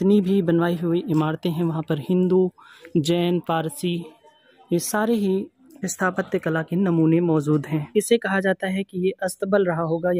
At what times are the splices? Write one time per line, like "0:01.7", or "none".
0:07.9